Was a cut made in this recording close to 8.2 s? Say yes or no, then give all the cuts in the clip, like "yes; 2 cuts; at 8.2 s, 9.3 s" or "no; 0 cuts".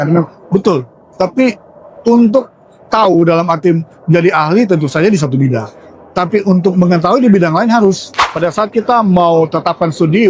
yes; 1 cut; at 8.2 s